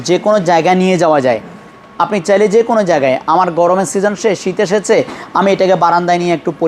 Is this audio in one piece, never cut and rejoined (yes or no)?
yes